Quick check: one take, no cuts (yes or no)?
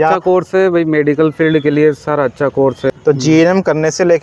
no